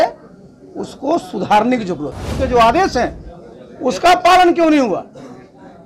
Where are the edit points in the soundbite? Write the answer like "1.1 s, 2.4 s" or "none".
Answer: 2.3 s